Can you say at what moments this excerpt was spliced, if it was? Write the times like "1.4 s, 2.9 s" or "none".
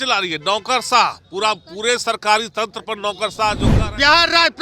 3.7 s